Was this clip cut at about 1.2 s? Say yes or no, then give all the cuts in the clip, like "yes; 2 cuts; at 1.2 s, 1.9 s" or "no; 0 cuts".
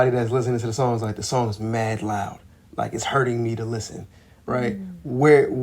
no; 0 cuts